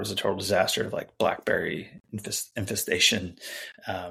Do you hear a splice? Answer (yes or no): no